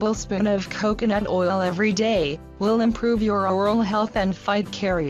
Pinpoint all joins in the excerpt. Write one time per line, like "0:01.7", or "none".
0:04.1